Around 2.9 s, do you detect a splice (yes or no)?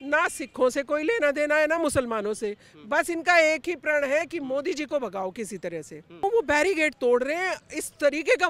no